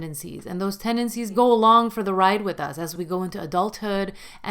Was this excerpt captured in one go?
no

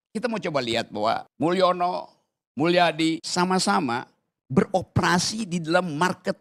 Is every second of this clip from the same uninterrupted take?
no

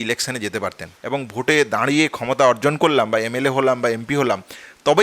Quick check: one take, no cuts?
no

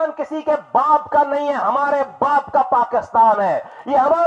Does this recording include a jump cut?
no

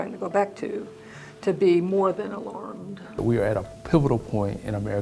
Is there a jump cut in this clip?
yes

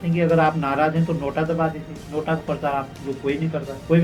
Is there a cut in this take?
no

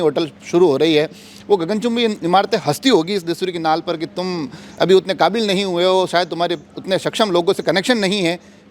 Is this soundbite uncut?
yes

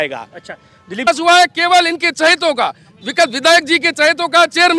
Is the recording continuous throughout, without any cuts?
no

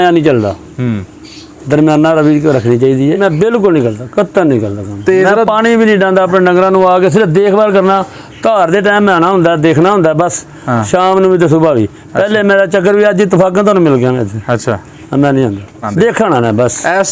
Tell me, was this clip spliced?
yes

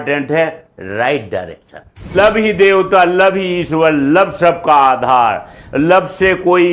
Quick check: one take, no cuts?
no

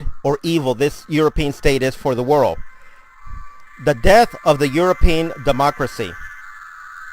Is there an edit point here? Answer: yes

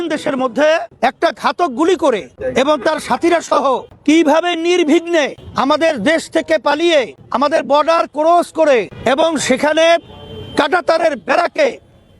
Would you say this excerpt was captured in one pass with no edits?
no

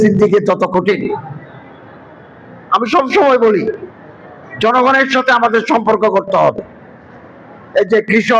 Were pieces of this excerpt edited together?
no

